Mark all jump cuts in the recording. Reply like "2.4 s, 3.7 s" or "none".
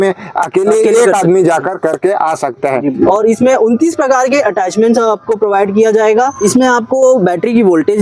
3.0 s, 6.3 s